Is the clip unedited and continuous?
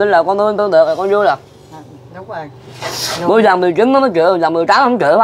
yes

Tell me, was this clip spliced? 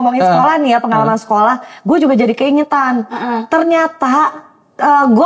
no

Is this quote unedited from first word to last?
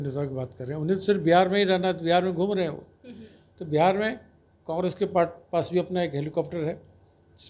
yes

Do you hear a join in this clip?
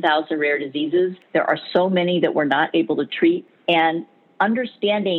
yes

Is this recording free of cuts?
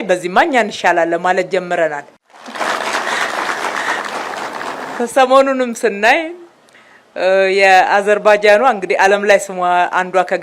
yes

